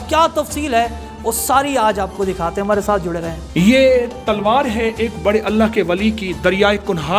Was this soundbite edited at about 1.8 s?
no; 1 cut; at 3.3 s

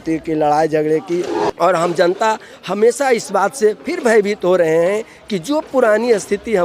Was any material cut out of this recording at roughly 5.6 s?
no; 1 cut; at 1.4 s

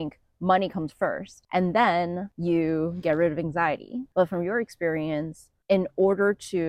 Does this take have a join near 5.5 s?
no; 3 cuts; at 1.3 s, 2.3 s, 4.0 s

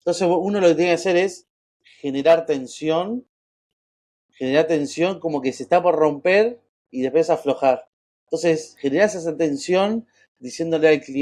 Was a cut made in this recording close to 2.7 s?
no; 0 cuts

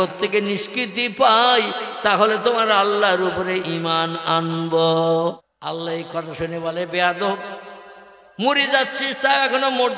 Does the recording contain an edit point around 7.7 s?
no; 1 cut; at 5.4 s

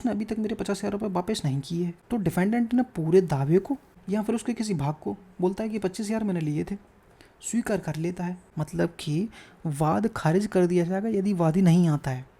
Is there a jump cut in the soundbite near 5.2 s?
no; 3 cuts; at 2.0 s, 3.9 s, 8.4 s

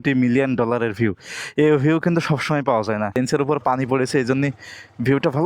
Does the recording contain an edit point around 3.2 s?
yes; 1 cut; at 3.2 s

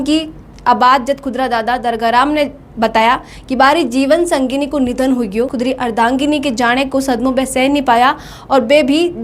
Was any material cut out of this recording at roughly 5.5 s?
yes; 1 cut; at 5.5 s

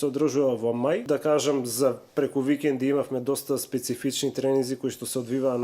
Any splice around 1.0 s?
yes; 1 cut; at 1.0 s

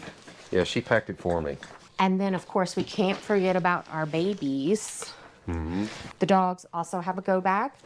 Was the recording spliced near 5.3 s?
no; 1 cut; at 1.7 s

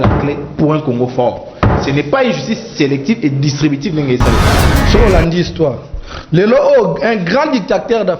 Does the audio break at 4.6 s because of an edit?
yes; 1 cut; at 4.6 s

